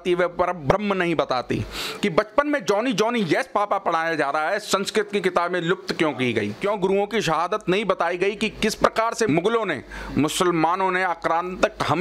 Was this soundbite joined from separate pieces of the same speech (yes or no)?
yes